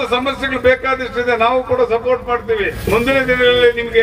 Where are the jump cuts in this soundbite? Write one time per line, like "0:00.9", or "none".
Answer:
0:02.8